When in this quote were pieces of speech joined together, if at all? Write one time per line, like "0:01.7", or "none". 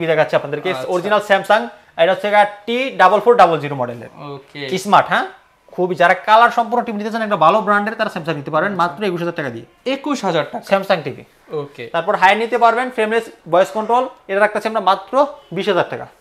none